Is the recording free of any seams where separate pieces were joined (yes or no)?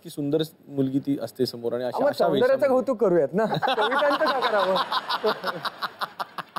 yes